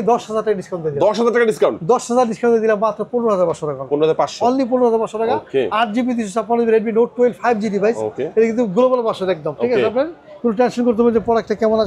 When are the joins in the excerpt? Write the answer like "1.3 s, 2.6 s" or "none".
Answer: none